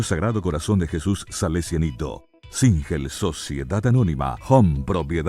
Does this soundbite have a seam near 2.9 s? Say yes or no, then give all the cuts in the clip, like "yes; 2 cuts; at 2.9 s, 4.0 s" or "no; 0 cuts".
no; 1 cut; at 4.4 s